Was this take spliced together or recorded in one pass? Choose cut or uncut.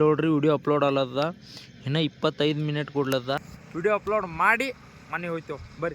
cut